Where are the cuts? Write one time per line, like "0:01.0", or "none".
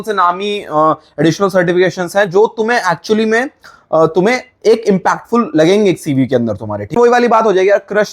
0:06.9